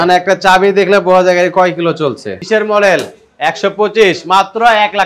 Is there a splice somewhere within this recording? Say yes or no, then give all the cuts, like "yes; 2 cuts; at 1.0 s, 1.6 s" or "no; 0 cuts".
yes; 1 cut; at 2.4 s